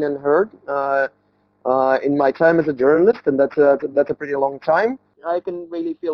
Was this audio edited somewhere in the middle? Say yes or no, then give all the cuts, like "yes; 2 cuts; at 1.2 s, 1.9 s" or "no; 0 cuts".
yes; 1 cut; at 5.2 s